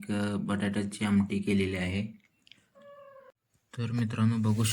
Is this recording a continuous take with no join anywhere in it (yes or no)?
no